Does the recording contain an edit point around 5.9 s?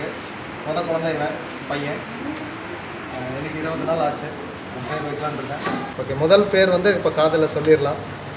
yes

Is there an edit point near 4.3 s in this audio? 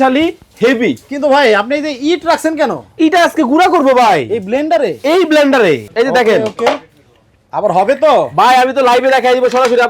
no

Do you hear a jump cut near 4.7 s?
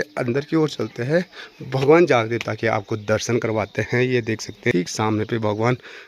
yes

